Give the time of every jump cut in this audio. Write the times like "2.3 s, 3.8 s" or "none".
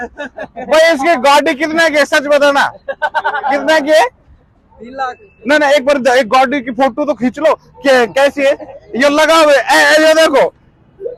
none